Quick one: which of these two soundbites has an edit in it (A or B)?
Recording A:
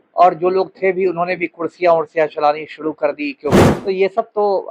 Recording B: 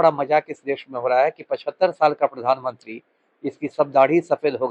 A